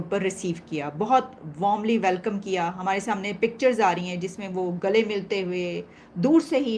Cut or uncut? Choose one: uncut